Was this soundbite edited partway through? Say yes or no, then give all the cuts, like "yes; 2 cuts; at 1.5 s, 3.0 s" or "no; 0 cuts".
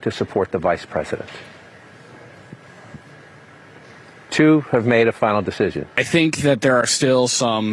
yes; 1 cut; at 5.9 s